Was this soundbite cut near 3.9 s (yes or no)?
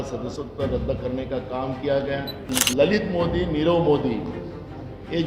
no